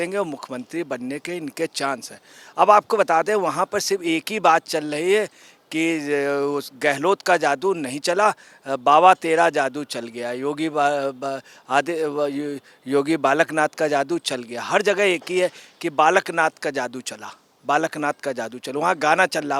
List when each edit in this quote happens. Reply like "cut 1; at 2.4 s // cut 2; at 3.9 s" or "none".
none